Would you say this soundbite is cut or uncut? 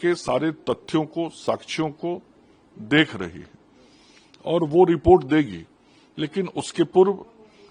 uncut